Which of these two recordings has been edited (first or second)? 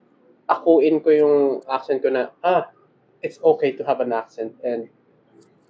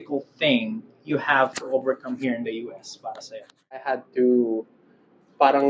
second